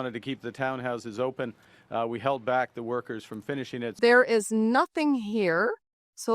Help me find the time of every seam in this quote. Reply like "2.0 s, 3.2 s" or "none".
4.0 s